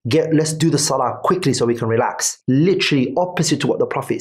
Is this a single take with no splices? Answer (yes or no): yes